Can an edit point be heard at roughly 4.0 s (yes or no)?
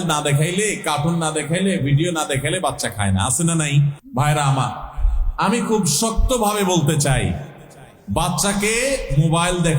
yes